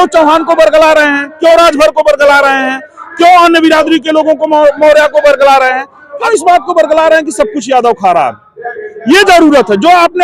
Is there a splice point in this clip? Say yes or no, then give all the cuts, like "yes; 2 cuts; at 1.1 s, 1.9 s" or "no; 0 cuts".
yes; 1 cut; at 6.2 s